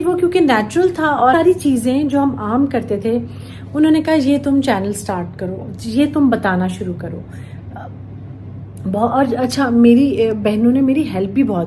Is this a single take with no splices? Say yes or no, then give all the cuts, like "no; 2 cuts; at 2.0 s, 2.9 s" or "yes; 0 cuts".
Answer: no; 2 cuts; at 1.3 s, 8.7 s